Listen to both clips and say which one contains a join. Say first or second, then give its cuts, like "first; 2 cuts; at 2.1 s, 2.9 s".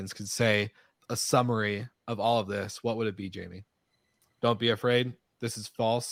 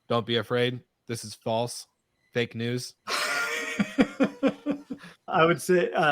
second; 2 cuts; at 3.0 s, 5.3 s